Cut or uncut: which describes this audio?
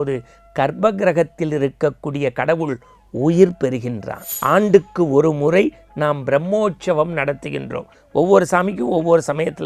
cut